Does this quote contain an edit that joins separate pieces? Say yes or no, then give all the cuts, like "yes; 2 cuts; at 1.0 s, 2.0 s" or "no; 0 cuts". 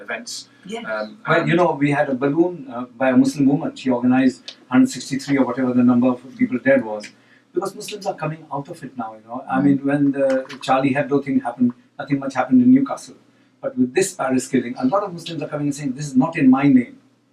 yes; 1 cut; at 14.3 s